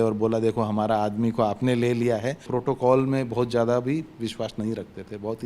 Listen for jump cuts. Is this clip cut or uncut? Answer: cut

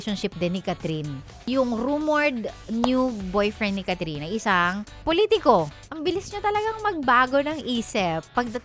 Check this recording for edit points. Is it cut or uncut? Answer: cut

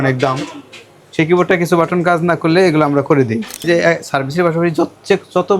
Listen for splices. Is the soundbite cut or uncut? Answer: cut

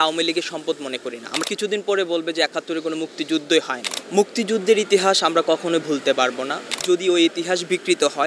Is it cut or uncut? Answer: cut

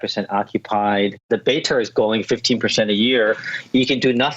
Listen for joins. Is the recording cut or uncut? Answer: cut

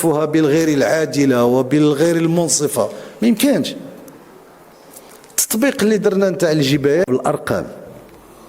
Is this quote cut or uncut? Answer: cut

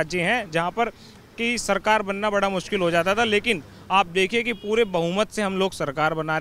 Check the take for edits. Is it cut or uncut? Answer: uncut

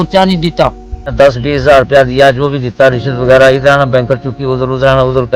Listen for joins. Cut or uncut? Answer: cut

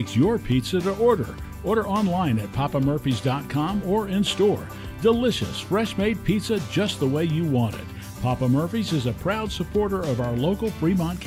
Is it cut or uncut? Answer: uncut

